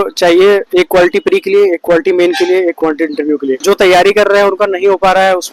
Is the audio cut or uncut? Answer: cut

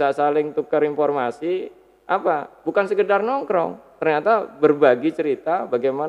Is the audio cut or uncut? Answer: uncut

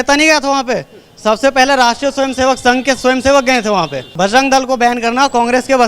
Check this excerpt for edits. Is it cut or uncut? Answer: cut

